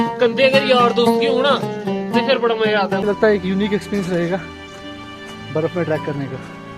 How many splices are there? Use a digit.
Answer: 1